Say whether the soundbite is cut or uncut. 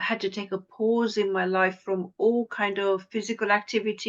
uncut